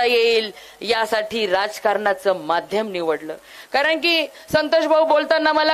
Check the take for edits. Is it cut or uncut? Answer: uncut